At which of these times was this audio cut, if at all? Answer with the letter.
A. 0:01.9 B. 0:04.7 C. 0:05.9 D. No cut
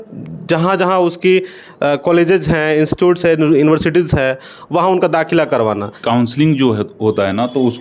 C